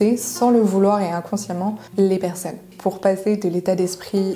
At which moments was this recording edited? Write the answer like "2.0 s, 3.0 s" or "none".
2.7 s